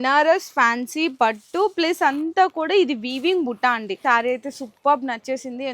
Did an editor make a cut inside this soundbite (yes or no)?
yes